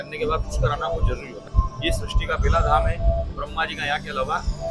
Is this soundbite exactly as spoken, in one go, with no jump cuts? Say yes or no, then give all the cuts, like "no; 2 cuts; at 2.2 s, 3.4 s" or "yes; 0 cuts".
no; 1 cut; at 1.4 s